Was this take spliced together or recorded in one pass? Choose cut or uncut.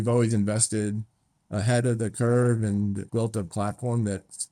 cut